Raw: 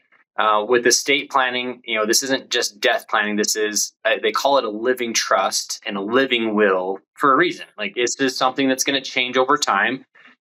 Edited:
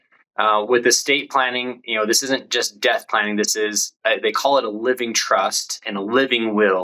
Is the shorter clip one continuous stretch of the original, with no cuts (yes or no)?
yes